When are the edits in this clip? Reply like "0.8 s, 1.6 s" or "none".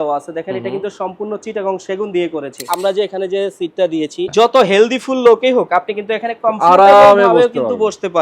2.6 s, 4.3 s